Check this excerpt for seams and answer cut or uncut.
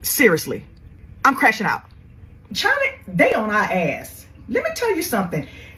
uncut